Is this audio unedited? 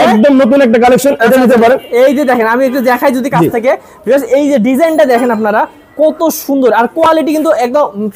yes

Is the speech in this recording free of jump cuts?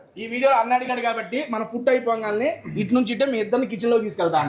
yes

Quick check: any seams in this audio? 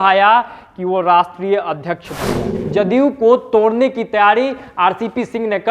yes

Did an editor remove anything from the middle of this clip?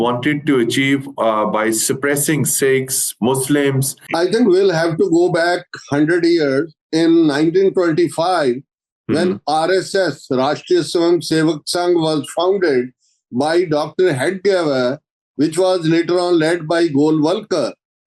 yes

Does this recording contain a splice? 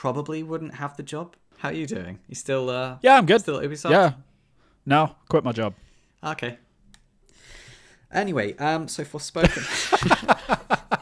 yes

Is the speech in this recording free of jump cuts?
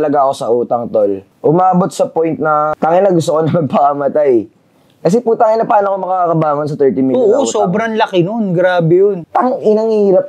no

